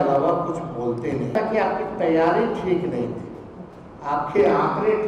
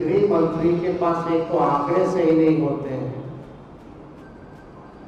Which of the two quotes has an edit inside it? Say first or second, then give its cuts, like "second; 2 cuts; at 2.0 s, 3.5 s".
first; 1 cut; at 1.3 s